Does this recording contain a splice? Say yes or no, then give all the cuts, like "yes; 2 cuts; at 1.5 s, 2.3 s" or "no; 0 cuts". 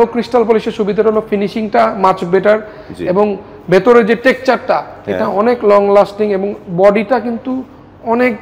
no; 0 cuts